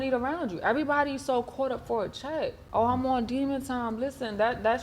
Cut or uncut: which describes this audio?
cut